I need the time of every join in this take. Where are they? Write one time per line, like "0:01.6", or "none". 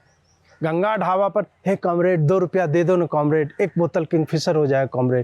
none

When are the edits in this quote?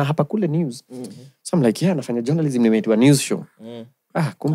none

